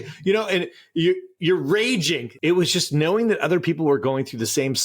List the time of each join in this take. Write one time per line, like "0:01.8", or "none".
0:02.2